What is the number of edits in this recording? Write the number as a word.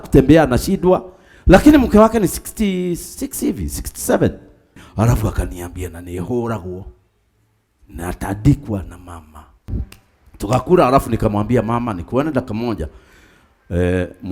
two